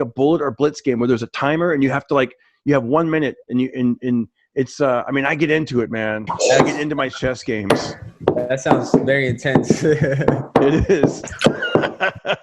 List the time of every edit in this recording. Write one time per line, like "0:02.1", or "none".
none